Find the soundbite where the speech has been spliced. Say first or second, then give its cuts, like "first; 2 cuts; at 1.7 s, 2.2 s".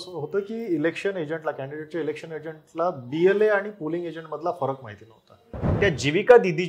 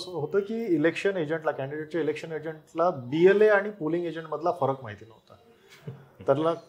first; 1 cut; at 5.6 s